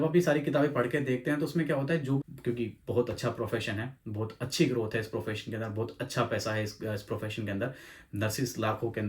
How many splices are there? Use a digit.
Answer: 1